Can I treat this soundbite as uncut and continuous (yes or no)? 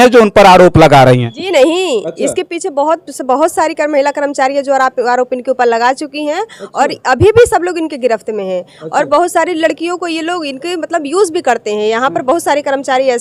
yes